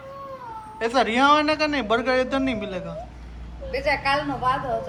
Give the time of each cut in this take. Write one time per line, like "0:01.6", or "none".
none